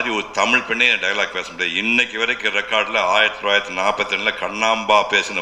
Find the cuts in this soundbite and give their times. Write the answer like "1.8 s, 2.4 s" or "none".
none